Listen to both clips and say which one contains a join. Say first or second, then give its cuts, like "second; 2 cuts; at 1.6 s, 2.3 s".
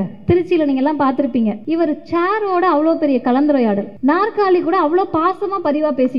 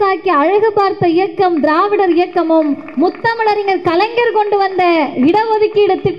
first; 2 cuts; at 1.6 s, 3.9 s